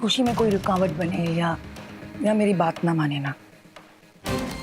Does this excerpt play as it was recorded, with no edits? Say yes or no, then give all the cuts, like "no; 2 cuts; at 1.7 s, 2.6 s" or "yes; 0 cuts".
yes; 0 cuts